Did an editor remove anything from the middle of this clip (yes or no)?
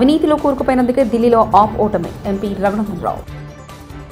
no